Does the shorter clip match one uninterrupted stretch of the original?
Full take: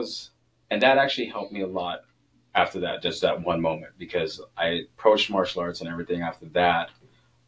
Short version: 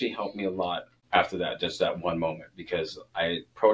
no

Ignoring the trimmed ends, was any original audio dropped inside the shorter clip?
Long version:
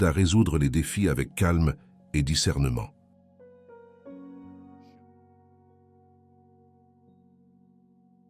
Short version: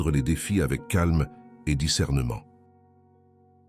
yes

